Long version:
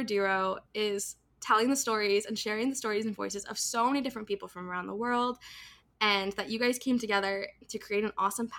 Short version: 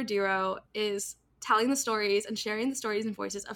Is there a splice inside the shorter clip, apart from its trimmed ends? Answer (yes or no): no